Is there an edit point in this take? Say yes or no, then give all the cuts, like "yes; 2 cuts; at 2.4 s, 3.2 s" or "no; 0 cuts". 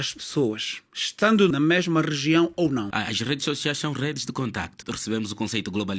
yes; 3 cuts; at 1.5 s, 2.9 s, 4.9 s